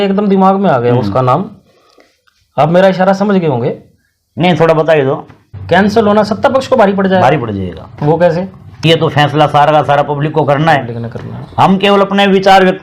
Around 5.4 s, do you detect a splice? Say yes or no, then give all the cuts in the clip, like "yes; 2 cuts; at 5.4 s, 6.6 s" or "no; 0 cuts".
yes; 2 cuts; at 5.4 s, 8.8 s